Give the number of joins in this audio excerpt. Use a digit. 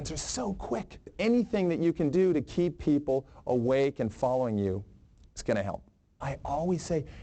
2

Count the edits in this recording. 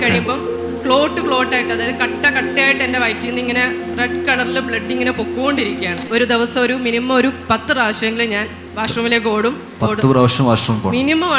2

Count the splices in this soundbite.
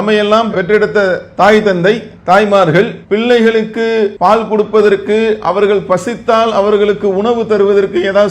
1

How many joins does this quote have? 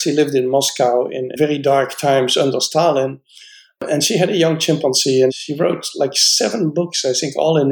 1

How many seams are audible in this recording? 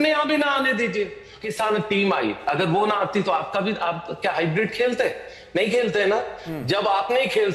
1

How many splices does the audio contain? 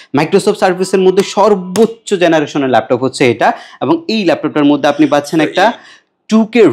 0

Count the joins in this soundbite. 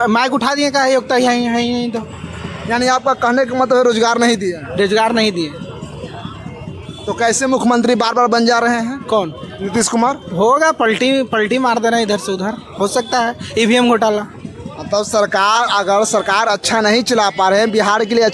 0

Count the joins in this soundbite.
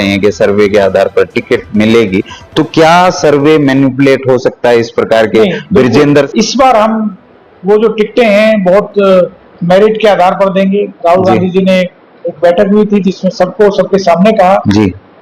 1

